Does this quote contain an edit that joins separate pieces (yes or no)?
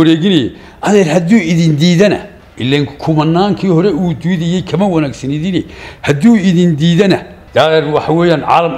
yes